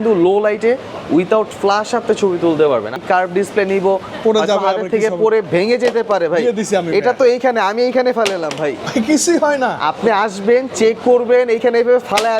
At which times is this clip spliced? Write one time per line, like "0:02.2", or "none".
0:03.0